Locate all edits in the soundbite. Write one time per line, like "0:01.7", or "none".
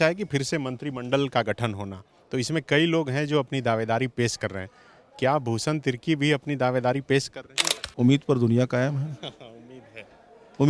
0:07.8